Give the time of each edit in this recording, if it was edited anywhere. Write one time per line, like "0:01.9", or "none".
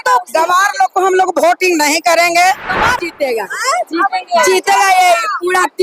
0:02.9